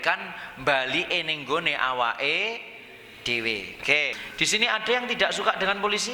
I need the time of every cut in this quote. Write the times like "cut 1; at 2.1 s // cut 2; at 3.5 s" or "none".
cut 1; at 4.2 s

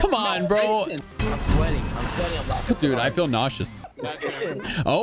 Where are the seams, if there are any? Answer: cut 1; at 1.0 s // cut 2; at 3.7 s

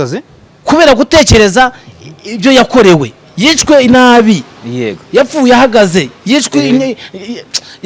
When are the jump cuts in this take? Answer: none

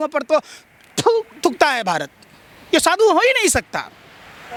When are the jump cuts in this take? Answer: none

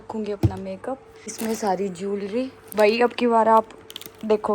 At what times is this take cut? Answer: cut 1; at 1.2 s // cut 2; at 2.6 s

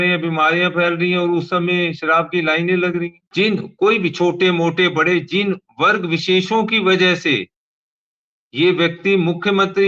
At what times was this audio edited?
cut 1; at 3.2 s

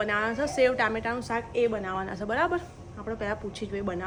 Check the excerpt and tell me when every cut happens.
none

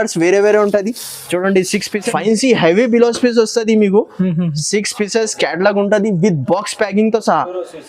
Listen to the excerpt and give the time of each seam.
cut 1; at 2.1 s

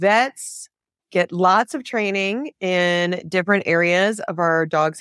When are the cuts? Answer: none

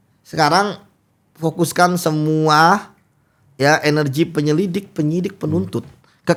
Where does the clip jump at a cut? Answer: none

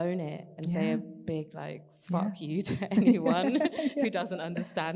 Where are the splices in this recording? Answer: none

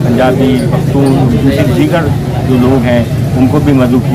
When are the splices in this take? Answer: none

